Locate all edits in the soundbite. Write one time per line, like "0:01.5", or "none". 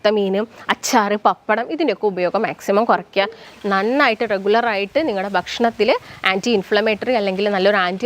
0:03.5